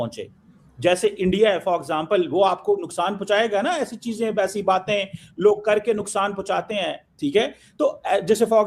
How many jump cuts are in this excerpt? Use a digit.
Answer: 0